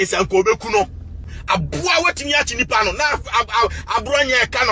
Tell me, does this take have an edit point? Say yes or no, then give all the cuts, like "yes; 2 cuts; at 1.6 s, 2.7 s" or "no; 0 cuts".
yes; 1 cut; at 1.3 s